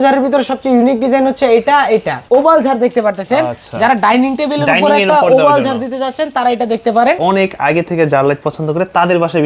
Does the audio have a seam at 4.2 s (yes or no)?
no